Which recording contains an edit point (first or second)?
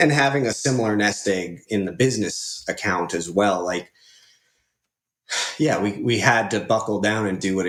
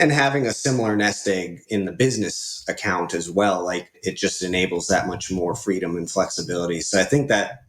second